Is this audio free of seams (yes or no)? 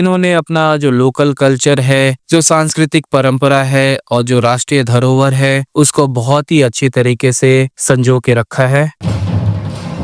yes